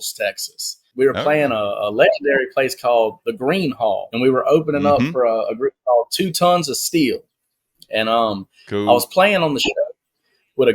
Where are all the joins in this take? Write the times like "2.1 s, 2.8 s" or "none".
0.9 s, 4.1 s